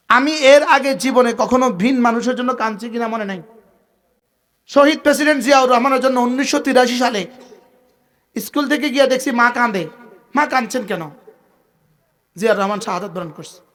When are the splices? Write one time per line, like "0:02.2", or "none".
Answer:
none